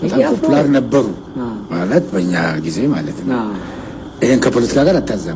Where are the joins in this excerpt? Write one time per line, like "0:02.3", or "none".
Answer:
none